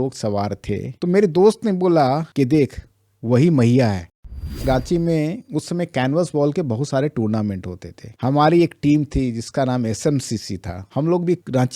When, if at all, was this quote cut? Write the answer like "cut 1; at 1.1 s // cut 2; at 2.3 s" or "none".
cut 1; at 4.5 s

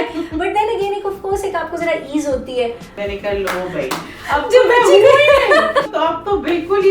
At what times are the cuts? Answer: cut 1; at 2.9 s // cut 2; at 5.9 s

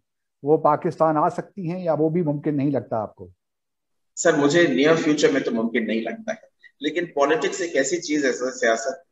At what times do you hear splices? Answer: none

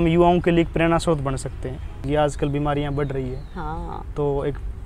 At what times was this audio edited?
cut 1; at 1.9 s

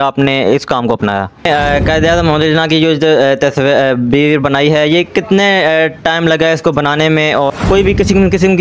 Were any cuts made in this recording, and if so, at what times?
cut 1; at 1.7 s // cut 2; at 7.5 s

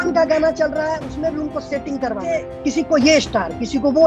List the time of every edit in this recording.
cut 1; at 2.5 s

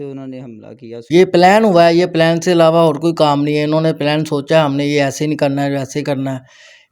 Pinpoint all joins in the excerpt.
cut 1; at 1.0 s

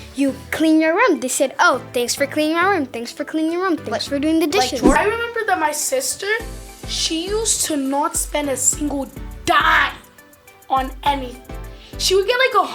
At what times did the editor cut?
cut 1; at 4.9 s

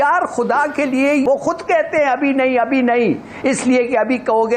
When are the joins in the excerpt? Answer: cut 1; at 1.2 s

